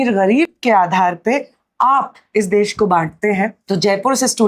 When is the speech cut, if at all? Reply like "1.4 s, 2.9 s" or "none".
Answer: 3.6 s